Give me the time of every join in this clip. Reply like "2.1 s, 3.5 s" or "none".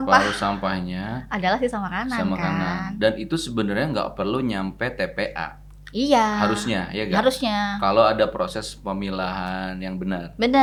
none